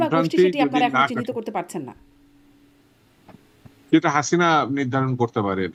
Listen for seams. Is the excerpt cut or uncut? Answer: uncut